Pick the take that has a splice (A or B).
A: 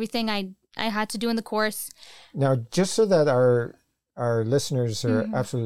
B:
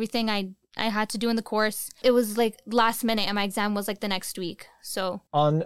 B